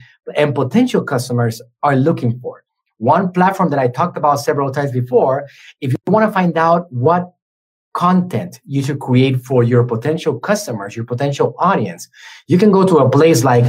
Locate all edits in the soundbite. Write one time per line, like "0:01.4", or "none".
none